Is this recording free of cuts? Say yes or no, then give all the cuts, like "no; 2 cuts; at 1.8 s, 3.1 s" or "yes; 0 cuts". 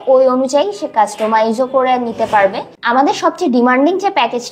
yes; 0 cuts